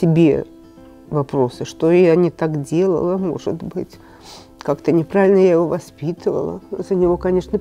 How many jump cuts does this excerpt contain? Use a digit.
1